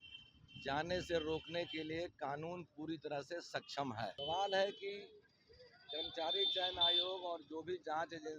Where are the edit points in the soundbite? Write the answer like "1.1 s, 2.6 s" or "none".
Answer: 4.2 s